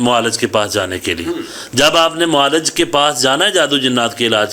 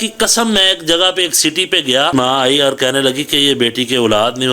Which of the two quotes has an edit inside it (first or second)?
second